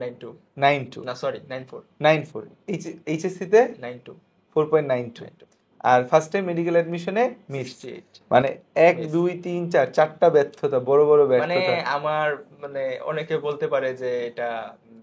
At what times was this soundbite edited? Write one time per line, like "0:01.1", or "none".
none